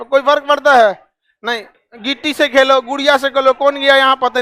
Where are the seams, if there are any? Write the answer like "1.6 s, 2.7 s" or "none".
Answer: 1.7 s